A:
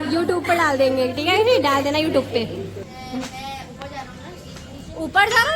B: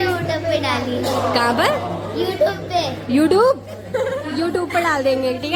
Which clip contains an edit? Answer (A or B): A